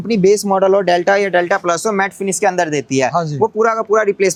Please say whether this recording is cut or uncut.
uncut